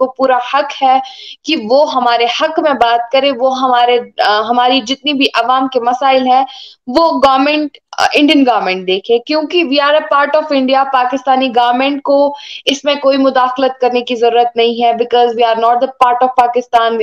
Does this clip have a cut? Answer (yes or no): no